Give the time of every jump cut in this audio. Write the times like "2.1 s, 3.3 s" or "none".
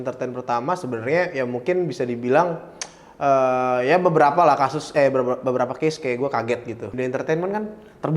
6.9 s